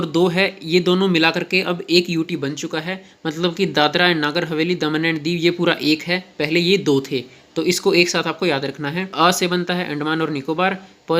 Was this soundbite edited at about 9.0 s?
yes; 1 cut; at 9.0 s

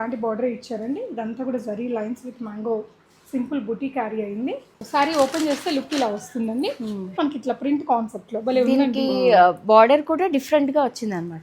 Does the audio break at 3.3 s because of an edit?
no; 2 cuts; at 4.7 s, 7.2 s

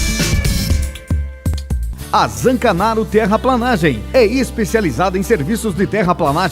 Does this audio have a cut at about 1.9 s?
yes; 1 cut; at 1.9 s

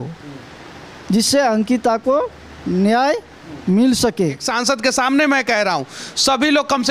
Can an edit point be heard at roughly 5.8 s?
no; 1 cut; at 4.5 s

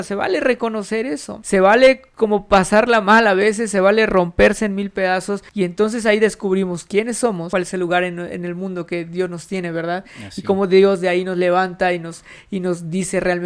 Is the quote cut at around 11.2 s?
no; 3 cuts; at 1.3 s, 5.4 s, 7.4 s

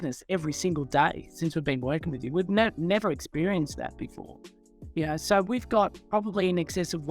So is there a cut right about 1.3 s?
no; 0 cuts

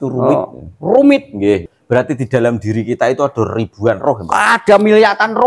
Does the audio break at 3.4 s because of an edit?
no; 1 cut; at 1.6 s

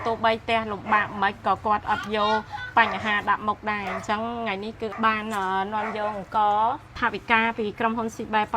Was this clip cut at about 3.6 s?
no; 2 cuts; at 4.9 s, 6.9 s

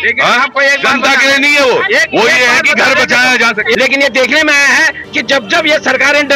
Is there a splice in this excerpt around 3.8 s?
yes; 1 cut; at 3.8 s

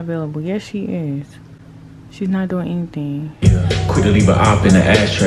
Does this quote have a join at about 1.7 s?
no; 1 cut; at 3.4 s

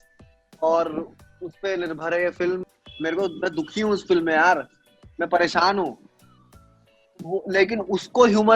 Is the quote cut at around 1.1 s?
no; 1 cut; at 2.7 s

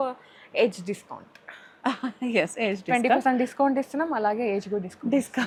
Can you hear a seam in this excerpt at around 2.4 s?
no; 0 cuts

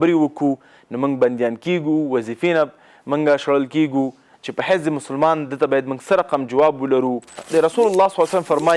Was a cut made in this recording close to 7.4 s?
yes; 1 cut; at 7.4 s

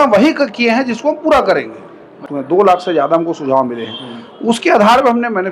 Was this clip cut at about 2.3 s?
yes; 1 cut; at 2.3 s

